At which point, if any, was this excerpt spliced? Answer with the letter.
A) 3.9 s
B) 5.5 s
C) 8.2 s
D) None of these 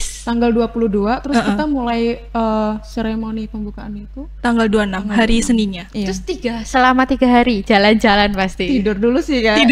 D